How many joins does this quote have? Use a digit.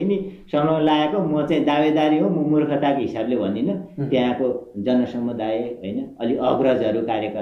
0